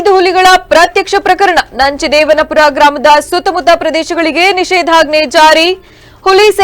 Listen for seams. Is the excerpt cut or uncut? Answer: uncut